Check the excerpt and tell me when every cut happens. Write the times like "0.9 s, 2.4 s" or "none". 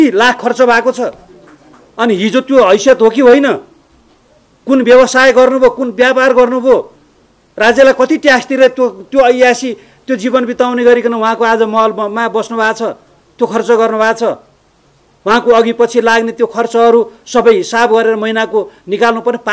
none